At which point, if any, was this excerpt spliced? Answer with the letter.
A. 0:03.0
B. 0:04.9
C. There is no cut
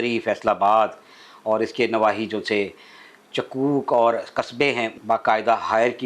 B